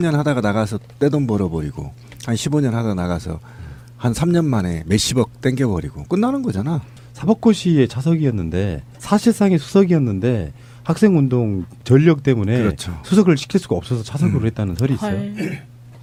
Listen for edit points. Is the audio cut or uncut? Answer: uncut